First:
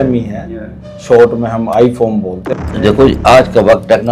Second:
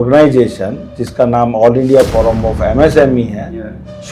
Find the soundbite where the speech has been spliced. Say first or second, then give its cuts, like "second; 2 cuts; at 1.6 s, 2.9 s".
first; 1 cut; at 2.5 s